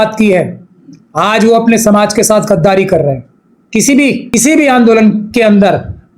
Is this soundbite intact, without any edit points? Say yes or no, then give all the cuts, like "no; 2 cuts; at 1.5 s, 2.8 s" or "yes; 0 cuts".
no; 1 cut; at 4.3 s